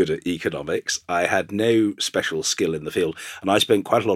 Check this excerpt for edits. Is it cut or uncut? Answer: cut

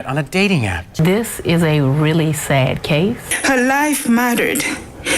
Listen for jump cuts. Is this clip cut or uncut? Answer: cut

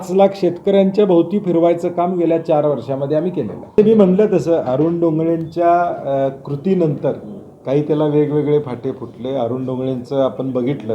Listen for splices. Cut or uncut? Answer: cut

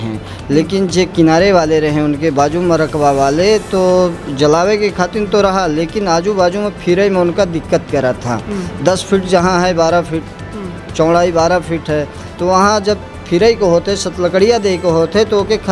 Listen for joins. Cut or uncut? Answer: uncut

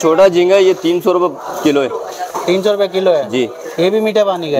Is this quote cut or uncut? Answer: uncut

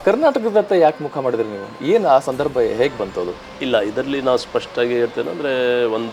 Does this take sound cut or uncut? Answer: uncut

